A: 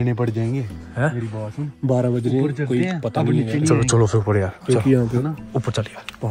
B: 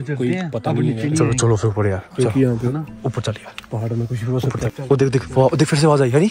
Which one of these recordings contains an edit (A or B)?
B